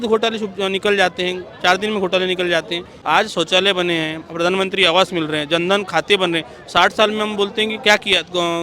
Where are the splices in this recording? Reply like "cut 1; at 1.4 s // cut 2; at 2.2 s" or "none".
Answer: cut 1; at 2.9 s